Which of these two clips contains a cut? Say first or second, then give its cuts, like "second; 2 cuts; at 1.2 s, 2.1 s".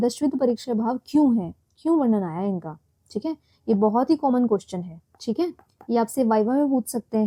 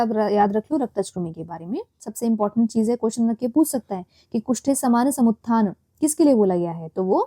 second; 1 cut; at 2.0 s